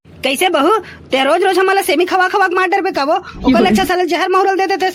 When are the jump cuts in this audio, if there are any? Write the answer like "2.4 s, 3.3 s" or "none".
none